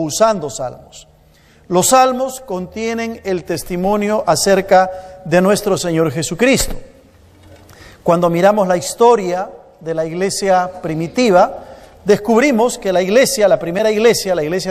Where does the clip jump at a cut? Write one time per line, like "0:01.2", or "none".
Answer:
none